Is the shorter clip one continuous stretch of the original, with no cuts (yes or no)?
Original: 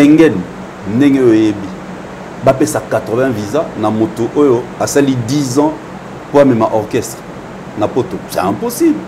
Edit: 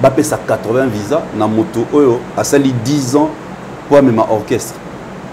yes